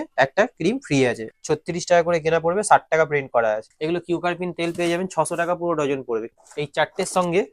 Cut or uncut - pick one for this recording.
cut